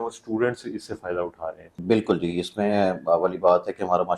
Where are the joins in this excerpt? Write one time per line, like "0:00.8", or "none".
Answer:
0:01.7